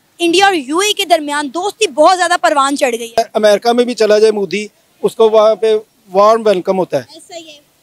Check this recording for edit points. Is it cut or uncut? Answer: cut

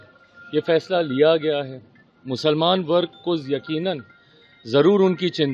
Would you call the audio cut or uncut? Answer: uncut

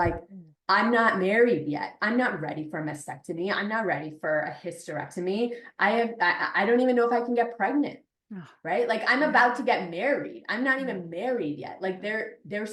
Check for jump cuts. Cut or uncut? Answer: uncut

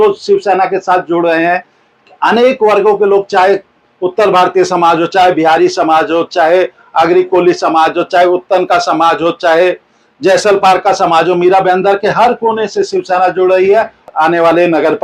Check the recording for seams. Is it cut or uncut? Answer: cut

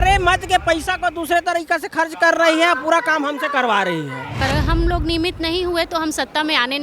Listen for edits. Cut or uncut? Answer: cut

